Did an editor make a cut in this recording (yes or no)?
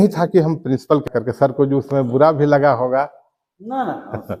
yes